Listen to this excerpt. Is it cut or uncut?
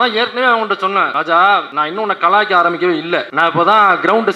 cut